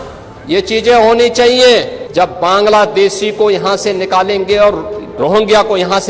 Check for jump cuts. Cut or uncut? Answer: cut